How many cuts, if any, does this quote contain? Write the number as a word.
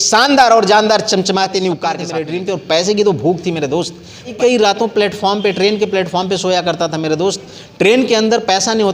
two